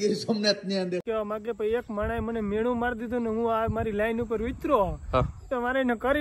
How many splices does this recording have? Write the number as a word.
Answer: one